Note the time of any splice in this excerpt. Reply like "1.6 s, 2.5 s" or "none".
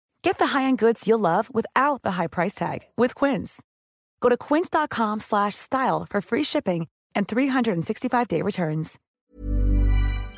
9.2 s